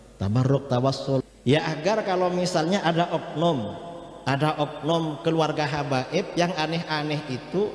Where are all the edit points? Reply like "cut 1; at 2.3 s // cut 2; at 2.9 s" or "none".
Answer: cut 1; at 1.2 s